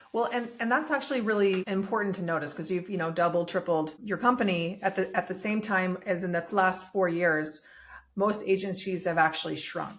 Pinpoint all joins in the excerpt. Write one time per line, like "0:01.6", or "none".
0:01.7
0:04.0